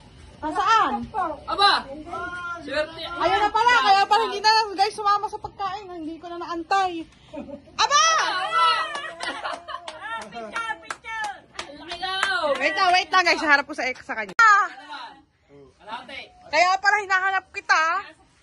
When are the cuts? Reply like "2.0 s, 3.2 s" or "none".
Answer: none

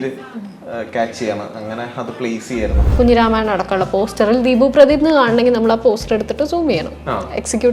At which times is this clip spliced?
2.9 s

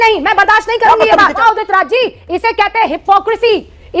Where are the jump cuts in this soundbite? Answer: 1.4 s

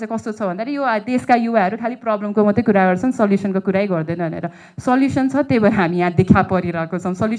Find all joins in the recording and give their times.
none

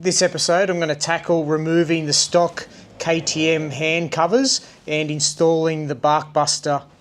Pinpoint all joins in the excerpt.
5.3 s

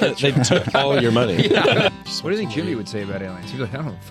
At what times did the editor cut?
1.9 s

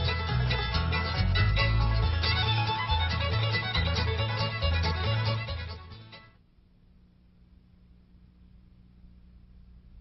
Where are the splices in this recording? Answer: none

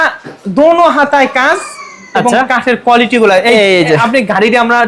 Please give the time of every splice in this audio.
none

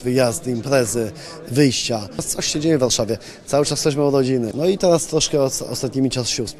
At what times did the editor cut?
2.3 s, 4.5 s

